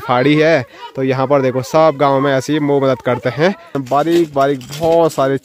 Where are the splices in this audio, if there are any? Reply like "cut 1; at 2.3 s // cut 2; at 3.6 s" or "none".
cut 1; at 3.7 s